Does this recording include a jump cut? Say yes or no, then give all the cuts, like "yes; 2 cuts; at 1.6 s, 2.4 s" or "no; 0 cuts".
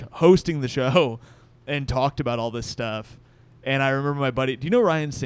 no; 0 cuts